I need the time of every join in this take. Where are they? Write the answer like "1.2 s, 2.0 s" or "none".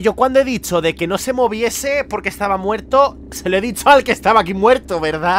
none